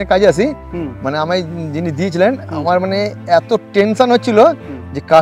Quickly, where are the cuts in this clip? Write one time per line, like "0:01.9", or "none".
none